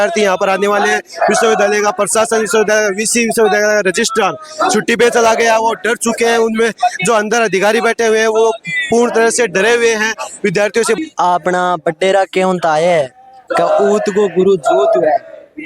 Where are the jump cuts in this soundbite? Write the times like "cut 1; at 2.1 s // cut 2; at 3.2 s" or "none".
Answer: cut 1; at 11.0 s